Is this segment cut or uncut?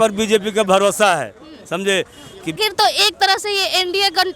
cut